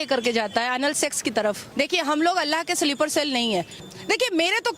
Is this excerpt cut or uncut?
cut